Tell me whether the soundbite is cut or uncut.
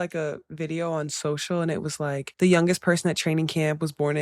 cut